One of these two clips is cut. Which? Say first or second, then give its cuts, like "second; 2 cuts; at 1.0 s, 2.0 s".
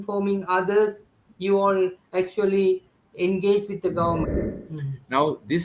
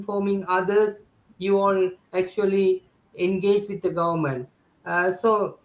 first; 1 cut; at 4.3 s